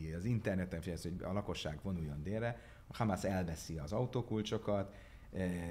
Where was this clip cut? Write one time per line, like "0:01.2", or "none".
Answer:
none